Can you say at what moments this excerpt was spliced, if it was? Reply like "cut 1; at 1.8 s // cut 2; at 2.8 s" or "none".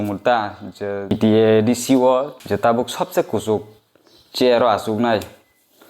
cut 1; at 1.1 s // cut 2; at 2.4 s